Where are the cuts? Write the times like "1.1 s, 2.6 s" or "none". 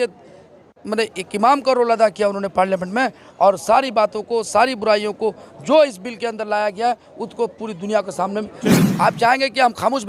8.8 s